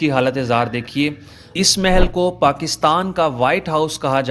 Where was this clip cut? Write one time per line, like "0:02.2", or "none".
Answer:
0:01.4